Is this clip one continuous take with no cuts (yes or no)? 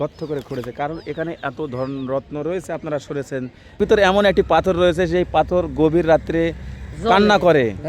no